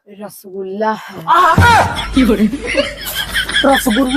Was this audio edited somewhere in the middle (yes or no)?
no